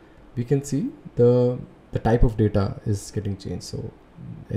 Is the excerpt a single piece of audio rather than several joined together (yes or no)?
no